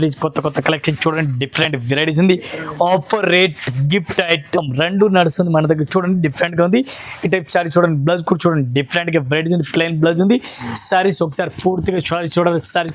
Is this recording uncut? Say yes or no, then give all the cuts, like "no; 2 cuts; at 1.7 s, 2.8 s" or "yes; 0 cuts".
yes; 0 cuts